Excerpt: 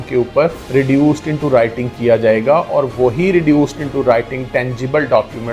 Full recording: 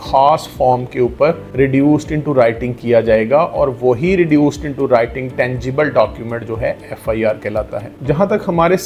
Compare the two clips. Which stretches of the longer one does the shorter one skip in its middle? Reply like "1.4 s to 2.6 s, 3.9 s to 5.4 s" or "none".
none